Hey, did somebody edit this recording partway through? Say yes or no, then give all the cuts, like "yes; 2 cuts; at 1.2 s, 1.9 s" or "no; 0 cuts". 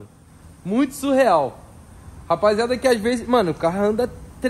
no; 0 cuts